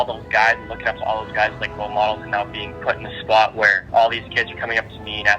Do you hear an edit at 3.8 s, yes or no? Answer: yes